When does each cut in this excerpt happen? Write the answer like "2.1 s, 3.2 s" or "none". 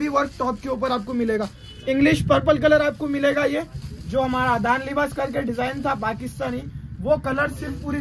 none